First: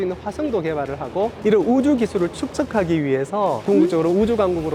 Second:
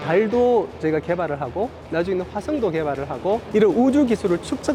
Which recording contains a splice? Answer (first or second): first